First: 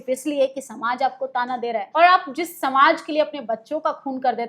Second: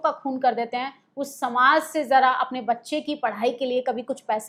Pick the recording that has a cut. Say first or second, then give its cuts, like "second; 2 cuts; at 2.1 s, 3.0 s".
first; 1 cut; at 1.8 s